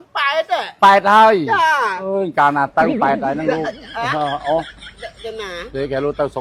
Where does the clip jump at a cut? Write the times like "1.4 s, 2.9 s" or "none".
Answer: none